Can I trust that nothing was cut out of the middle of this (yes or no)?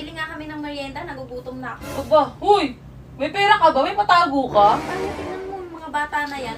no